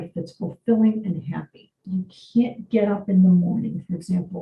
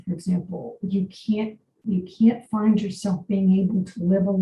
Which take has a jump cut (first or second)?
first